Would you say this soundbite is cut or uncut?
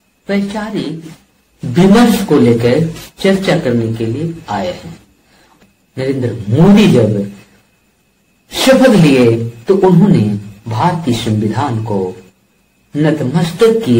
cut